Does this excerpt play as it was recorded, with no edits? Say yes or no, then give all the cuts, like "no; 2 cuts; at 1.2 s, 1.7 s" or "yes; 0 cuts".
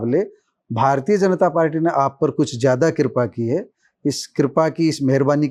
yes; 0 cuts